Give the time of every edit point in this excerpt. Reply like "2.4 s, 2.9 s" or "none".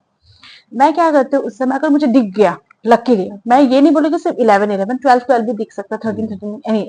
none

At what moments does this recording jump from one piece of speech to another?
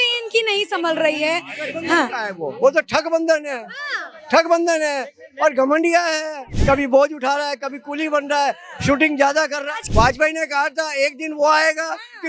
6.5 s, 9.7 s

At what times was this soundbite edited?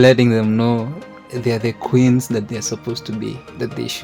none

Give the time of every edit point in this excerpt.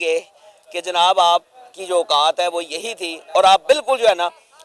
none

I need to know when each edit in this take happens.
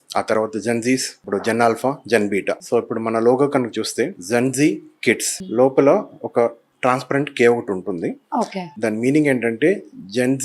1.2 s, 2.6 s, 4.2 s, 5.4 s, 6.7 s, 8.7 s

